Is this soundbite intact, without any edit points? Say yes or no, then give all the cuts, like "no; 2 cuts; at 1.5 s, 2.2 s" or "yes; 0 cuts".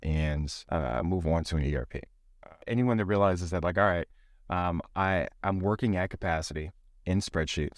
no; 1 cut; at 2.4 s